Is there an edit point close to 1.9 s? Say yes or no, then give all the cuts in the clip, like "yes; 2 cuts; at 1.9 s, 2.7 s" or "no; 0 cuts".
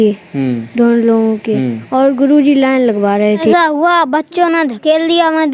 no; 1 cut; at 3.5 s